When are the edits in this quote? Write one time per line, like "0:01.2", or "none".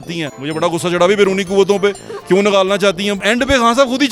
0:03.2